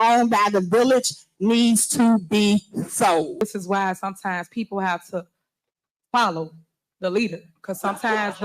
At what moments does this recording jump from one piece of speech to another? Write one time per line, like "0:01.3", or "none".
0:03.4